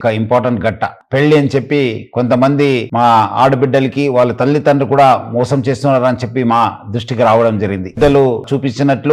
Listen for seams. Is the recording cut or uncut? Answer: cut